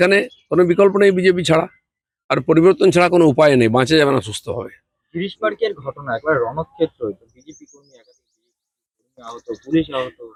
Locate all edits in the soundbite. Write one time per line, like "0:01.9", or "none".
none